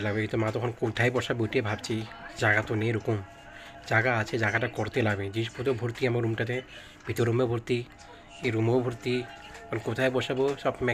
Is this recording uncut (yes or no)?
yes